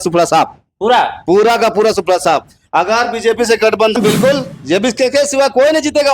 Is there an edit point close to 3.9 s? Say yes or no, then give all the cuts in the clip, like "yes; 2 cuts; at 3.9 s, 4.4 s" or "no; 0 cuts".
yes; 1 cut; at 3.9 s